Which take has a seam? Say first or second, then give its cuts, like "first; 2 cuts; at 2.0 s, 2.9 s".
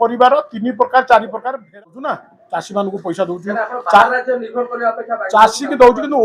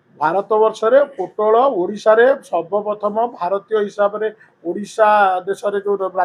first; 1 cut; at 1.7 s